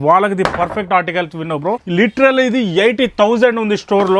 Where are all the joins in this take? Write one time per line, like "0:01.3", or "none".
0:01.8